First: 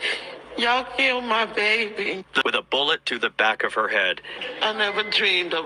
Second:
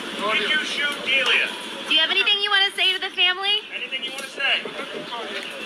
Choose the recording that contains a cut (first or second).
first